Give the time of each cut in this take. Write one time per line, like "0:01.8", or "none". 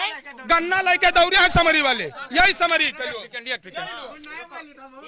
none